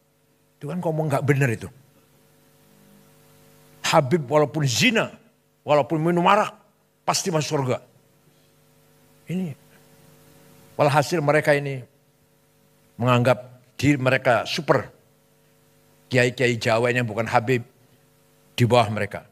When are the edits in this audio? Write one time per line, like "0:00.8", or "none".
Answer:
none